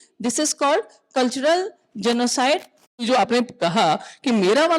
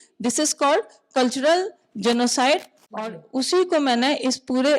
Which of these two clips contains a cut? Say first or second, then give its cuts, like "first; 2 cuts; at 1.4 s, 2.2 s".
first; 1 cut; at 3.0 s